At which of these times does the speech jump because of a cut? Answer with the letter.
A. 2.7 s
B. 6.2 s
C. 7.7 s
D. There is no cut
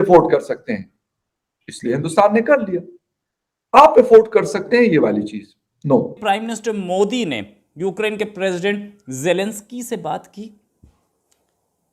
B